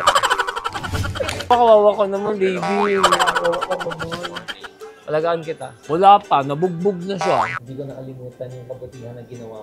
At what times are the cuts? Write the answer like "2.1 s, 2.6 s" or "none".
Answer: 7.5 s